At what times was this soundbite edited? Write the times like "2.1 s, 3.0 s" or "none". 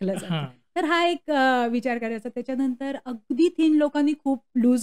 none